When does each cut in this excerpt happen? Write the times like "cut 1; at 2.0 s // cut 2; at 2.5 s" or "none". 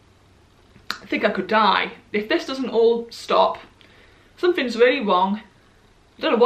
none